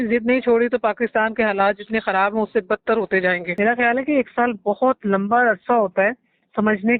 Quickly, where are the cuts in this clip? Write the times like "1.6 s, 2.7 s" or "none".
3.5 s